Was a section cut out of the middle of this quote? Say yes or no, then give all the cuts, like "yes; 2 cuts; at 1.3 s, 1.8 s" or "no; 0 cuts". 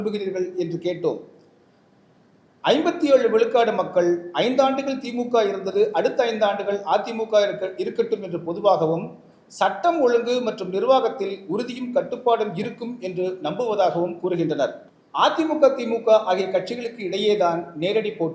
no; 0 cuts